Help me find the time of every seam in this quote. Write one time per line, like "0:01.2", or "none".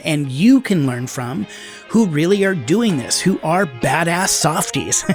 none

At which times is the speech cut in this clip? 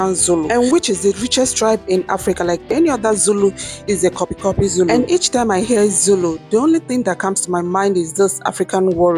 0:02.7

